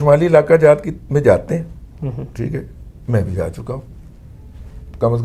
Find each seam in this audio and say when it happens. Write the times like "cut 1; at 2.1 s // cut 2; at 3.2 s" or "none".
none